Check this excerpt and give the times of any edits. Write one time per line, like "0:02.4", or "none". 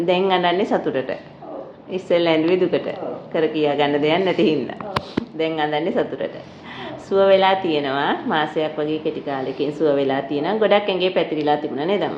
none